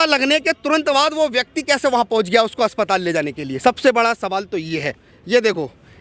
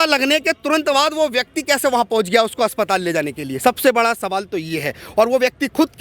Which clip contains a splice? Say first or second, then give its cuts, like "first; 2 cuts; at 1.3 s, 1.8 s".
first; 1 cut; at 5.0 s